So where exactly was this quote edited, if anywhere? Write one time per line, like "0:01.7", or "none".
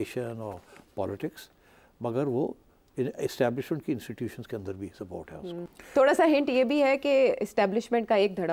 0:05.7

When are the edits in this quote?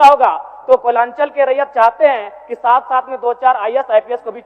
none

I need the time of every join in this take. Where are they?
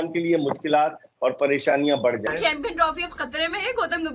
0:02.3

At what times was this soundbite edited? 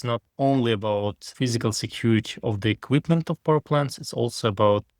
none

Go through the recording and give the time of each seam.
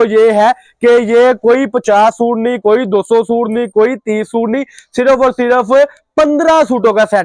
none

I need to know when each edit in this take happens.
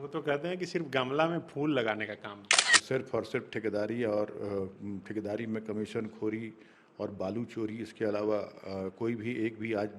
0:02.8

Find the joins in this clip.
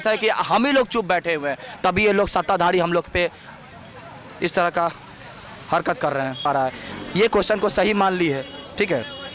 0:06.4

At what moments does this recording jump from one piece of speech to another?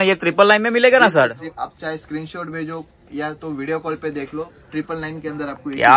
0:01.5

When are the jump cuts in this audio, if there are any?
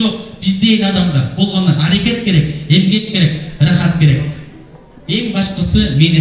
none

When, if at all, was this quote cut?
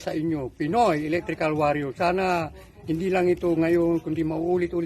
none

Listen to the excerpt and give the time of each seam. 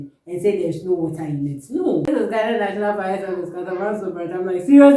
0:02.1

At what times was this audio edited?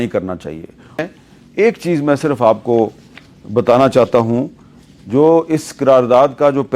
0:01.0

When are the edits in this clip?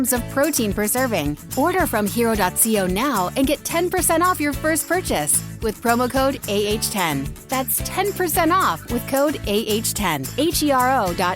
0:01.4
0:10.2

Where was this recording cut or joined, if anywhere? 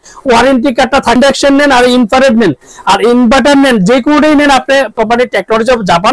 0:01.2
0:04.9

